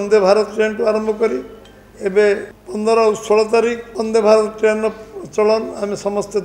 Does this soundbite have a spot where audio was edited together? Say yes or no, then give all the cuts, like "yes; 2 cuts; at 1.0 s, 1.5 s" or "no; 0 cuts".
yes; 2 cuts; at 2.6 s, 3.9 s